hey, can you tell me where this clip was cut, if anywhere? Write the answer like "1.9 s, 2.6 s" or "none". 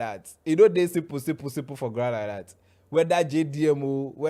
none